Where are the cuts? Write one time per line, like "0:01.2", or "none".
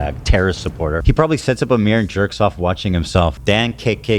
0:01.0
0:03.4